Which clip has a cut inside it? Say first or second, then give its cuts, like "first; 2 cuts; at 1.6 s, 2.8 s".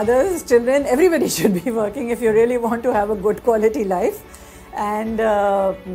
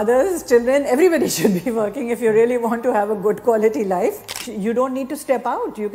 second; 1 cut; at 4.5 s